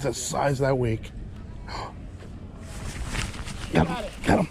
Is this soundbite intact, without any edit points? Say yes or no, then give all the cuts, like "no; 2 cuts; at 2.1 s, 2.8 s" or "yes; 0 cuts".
no; 1 cut; at 1.4 s